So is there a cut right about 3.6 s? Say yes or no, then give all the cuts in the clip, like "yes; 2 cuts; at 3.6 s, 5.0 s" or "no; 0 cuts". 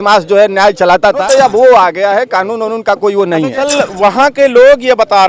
yes; 2 cuts; at 1.2 s, 3.6 s